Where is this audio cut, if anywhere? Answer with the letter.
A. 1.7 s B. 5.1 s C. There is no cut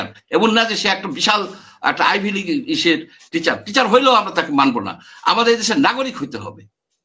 C